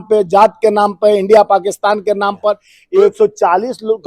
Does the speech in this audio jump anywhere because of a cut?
yes; 1 cut; at 2.7 s

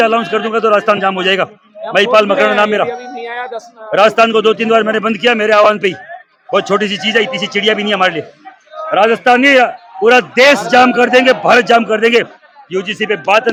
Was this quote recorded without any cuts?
yes; 0 cuts

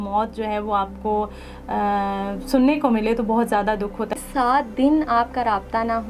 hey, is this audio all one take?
no; 1 cut; at 4.1 s

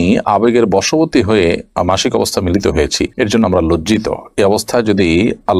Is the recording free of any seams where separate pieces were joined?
yes; 0 cuts

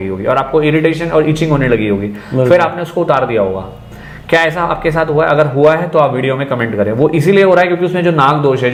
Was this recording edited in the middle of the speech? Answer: no; 0 cuts

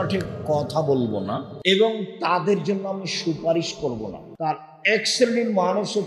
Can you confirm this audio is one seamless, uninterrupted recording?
no; 2 cuts; at 1.5 s, 4.3 s

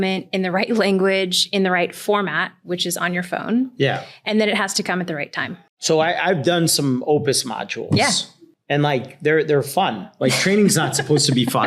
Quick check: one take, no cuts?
yes; 0 cuts

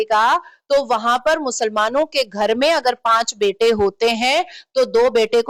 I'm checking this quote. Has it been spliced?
no; 0 cuts

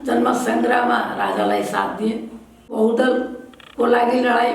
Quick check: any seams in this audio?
yes; 1 cut; at 2.7 s

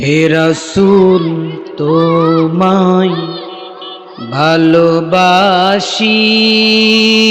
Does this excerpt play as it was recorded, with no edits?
yes; 0 cuts

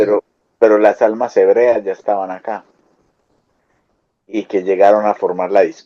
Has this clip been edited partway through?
no; 0 cuts

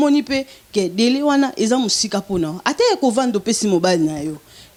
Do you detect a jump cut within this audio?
no; 0 cuts

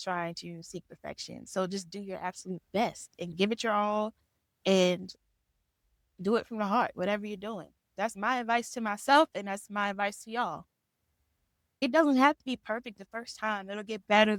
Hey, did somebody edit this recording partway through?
no; 0 cuts

